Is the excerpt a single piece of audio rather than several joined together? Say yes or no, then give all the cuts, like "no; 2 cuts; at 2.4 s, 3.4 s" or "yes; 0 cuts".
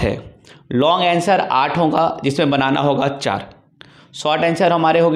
yes; 0 cuts